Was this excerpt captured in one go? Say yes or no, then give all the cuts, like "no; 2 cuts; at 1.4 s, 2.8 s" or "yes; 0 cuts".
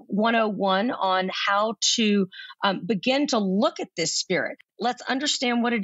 no; 1 cut; at 4.7 s